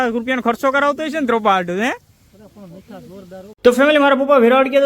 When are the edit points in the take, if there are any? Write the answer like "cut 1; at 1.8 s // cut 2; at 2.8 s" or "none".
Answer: cut 1; at 3.6 s

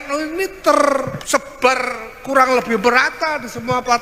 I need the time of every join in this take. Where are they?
cut 1; at 1.2 s

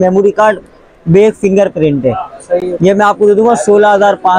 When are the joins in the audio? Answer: none

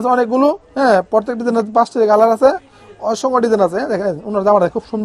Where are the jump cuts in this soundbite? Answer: none

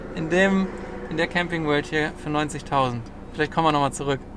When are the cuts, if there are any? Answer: none

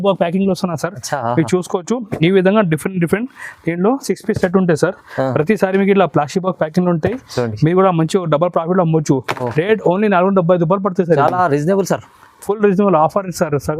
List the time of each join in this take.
none

